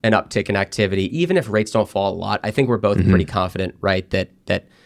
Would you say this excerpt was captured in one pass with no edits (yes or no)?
yes